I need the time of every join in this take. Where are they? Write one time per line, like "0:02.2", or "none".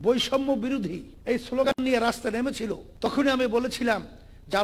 0:01.1
0:02.8